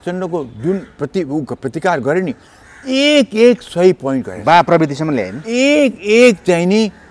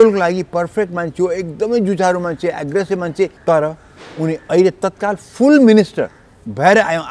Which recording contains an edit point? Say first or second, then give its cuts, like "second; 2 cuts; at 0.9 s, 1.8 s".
second; 1 cut; at 3.4 s